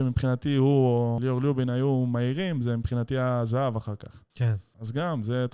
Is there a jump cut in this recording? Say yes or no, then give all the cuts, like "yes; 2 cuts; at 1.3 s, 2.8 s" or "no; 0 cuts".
yes; 2 cuts; at 1.2 s, 4.6 s